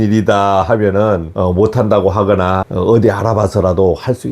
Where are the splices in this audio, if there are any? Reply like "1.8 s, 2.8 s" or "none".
1.3 s, 2.7 s